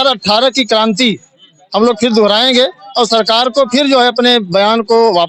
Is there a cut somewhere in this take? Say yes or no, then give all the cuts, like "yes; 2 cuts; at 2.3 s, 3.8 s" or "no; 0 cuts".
no; 0 cuts